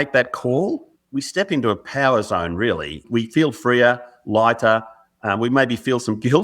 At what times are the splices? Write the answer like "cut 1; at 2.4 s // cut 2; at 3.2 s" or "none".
cut 1; at 0.9 s // cut 2; at 3.0 s